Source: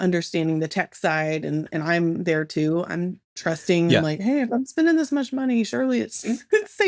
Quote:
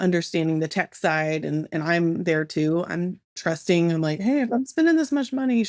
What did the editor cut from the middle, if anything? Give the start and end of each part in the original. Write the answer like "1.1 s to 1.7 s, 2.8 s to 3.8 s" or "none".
none